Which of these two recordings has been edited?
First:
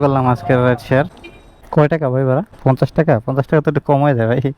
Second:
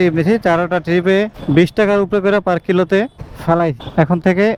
first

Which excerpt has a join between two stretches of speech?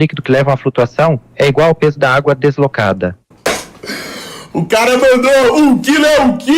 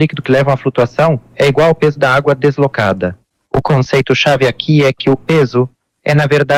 first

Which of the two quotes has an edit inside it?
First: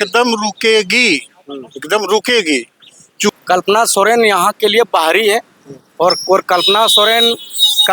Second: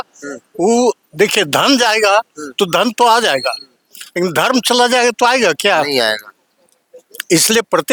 first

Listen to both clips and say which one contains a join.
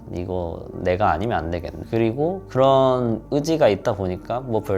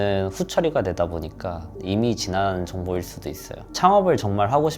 second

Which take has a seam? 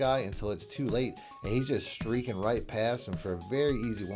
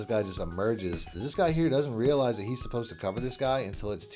second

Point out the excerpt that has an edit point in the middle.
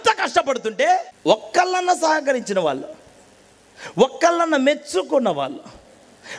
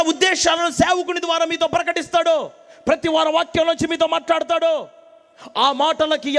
first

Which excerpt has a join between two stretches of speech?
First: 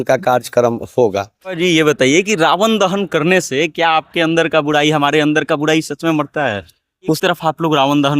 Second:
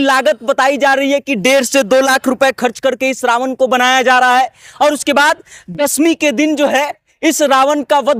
first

